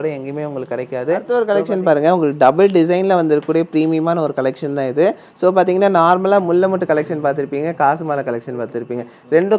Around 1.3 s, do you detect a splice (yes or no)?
yes